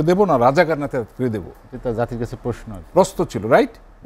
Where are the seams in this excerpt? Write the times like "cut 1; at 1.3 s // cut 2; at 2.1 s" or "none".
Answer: none